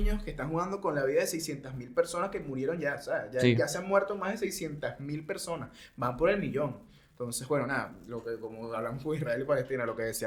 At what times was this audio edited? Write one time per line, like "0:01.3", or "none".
none